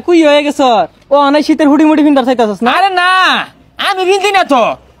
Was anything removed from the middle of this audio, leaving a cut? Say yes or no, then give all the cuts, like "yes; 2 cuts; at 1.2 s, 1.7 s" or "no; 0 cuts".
no; 0 cuts